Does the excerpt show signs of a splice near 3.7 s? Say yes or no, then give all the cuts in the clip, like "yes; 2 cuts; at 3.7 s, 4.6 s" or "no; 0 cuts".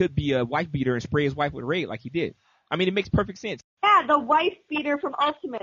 yes; 1 cut; at 3.7 s